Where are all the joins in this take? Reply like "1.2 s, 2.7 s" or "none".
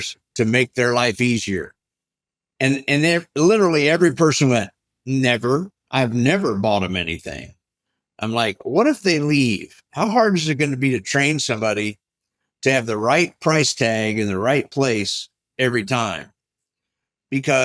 none